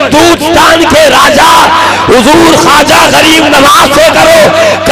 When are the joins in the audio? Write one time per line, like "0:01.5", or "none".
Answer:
none